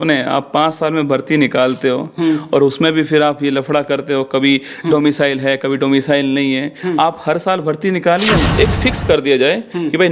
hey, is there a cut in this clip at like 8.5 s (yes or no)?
yes